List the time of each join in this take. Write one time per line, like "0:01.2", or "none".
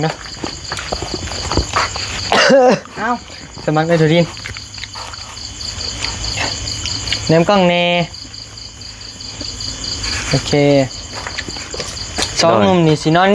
none